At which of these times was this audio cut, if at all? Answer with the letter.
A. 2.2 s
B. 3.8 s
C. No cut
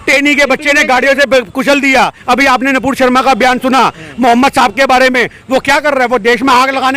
A